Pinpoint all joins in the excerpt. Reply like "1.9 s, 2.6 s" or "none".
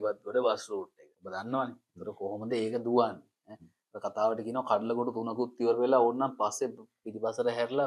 1.0 s